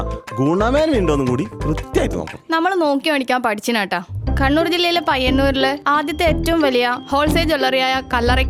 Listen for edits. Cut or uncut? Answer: uncut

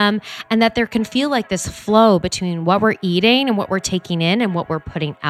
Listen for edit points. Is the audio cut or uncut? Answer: uncut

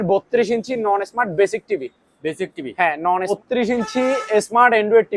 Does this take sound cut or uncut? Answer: cut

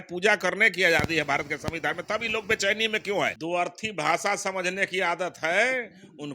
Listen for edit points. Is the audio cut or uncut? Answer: cut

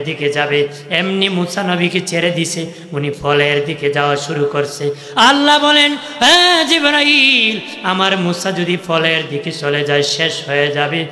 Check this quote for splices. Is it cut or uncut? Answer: uncut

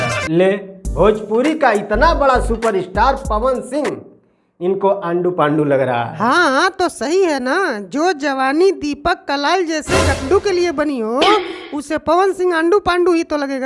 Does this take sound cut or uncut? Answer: uncut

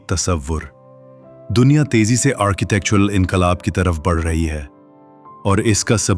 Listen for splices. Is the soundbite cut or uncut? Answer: cut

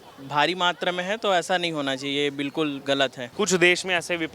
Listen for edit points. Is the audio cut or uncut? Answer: cut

